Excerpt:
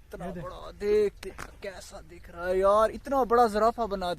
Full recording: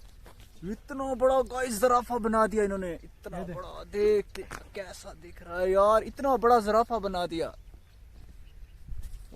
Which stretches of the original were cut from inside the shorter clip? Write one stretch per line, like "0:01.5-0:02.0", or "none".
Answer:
none

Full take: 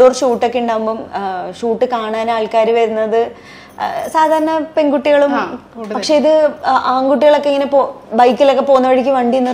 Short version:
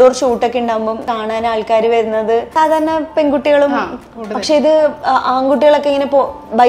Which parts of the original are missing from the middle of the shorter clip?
0:01.1-0:01.9
0:03.3-0:04.1

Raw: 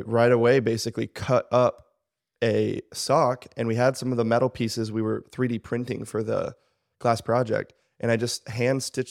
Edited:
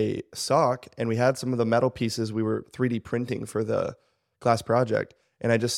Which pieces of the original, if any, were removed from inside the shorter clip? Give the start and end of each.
none

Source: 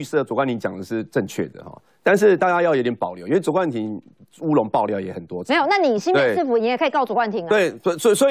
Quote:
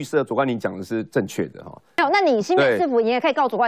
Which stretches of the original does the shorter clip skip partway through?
0:02.0-0:05.6

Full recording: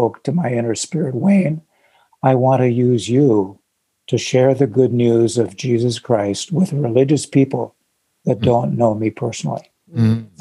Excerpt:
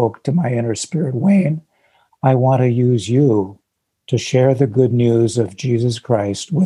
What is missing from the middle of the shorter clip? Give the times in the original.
none

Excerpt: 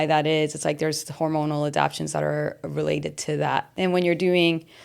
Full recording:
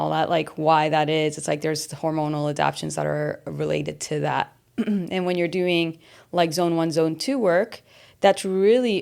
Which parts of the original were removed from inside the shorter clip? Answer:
0:04.6-0:05.1

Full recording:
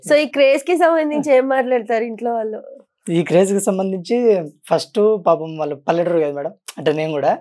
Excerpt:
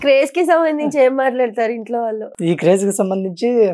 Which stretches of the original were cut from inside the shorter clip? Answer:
0:02.6-0:02.9

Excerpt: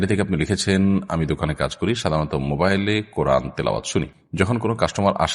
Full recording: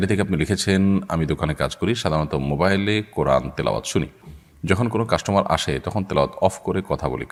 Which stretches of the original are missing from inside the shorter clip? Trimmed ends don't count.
0:04.2-0:04.5

